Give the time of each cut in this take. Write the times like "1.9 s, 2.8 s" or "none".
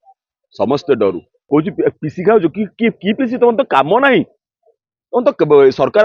1.4 s